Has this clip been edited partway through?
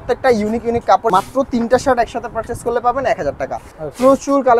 yes; 2 cuts; at 1.1 s, 3.7 s

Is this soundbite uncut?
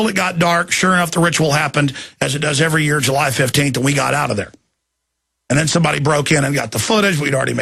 no; 1 cut; at 2.5 s

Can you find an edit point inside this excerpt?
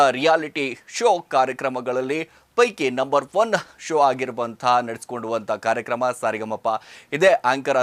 no; 0 cuts

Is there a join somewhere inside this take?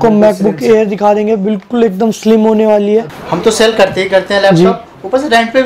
yes; 1 cut; at 3.1 s

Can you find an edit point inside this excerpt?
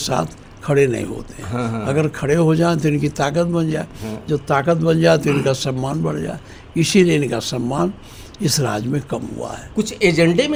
no; 0 cuts

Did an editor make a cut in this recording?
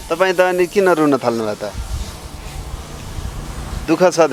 no; 0 cuts

